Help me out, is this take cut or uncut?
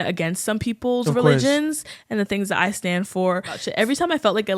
cut